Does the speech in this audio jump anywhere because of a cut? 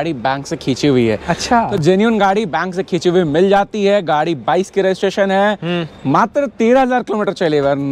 no; 0 cuts

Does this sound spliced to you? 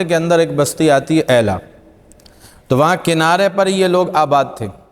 no; 0 cuts

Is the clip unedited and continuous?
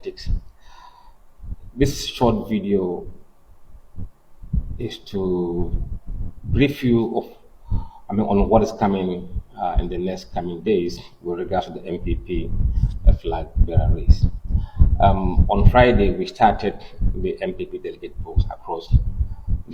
yes; 0 cuts

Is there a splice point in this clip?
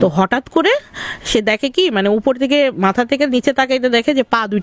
no; 0 cuts

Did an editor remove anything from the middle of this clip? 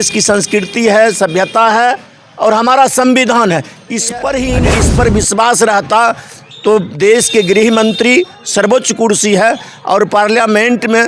yes; 1 cut; at 4.7 s

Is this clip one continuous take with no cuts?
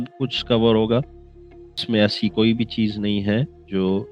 no; 1 cut; at 1.7 s

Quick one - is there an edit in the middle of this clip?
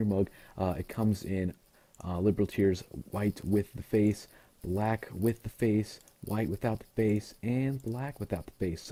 no; 0 cuts

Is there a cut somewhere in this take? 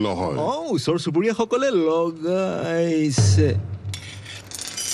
no; 0 cuts

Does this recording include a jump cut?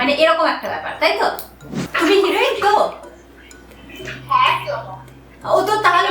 yes; 1 cut; at 1.8 s

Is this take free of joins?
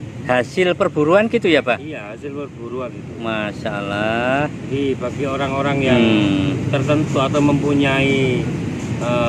yes; 0 cuts

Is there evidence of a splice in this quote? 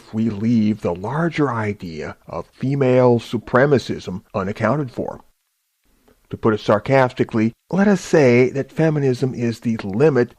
yes; 1 cut; at 6.9 s

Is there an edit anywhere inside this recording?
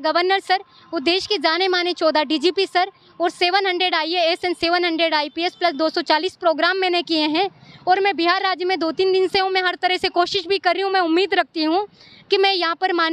no; 0 cuts

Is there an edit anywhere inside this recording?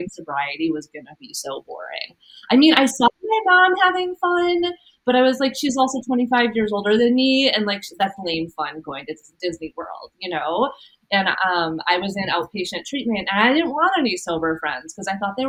no; 0 cuts

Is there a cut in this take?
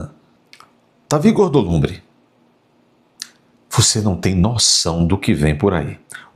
no; 0 cuts

